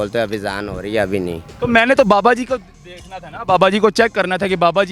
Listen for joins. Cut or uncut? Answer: uncut